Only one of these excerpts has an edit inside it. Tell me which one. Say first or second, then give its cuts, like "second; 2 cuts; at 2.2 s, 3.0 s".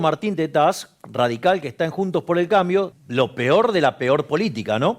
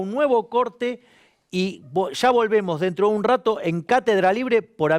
first; 1 cut; at 3.0 s